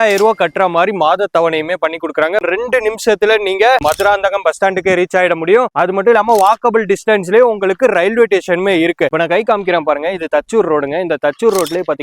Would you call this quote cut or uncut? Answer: cut